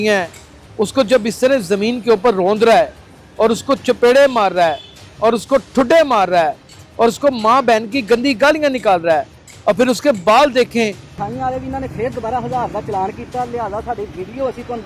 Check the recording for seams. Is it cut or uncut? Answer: uncut